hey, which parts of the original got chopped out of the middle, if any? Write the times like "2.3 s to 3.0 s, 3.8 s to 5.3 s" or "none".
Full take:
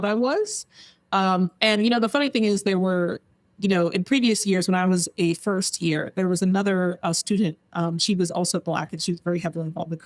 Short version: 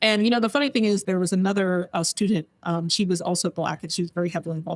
2.6 s to 6.1 s